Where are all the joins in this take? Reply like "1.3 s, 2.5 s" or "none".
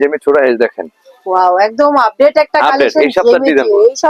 none